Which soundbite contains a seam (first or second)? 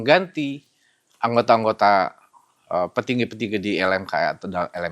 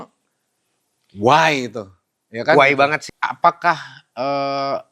second